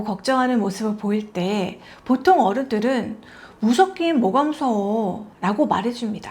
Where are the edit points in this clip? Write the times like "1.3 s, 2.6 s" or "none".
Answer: 5.3 s

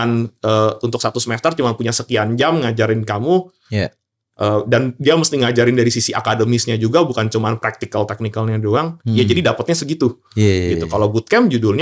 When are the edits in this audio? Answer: none

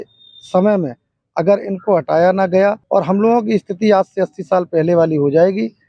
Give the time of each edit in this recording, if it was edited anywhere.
2.8 s

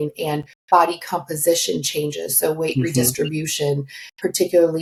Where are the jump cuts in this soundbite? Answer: none

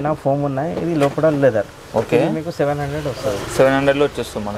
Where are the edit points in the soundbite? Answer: none

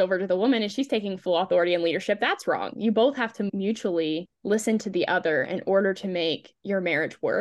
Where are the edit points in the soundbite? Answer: 6.5 s

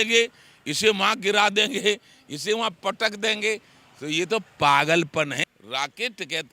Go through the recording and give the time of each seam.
5.5 s

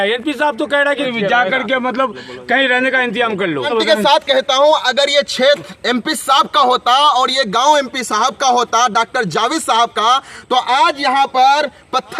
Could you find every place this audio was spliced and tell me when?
1.0 s, 3.7 s

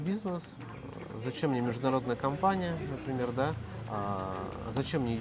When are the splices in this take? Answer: none

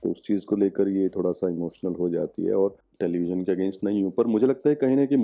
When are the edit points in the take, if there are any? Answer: 2.8 s

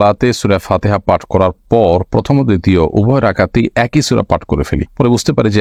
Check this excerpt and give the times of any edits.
none

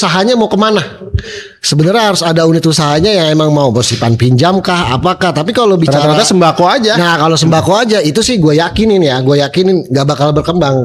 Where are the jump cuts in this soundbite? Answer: none

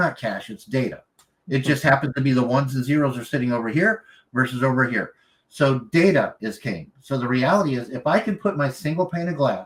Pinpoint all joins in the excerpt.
none

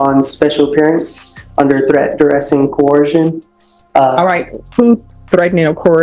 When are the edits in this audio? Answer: none

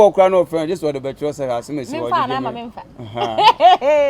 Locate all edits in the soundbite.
none

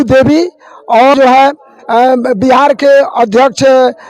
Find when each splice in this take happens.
1.1 s

